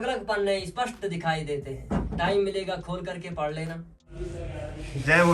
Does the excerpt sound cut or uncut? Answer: cut